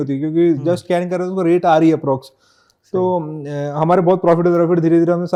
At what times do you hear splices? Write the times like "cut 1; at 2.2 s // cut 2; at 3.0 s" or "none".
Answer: none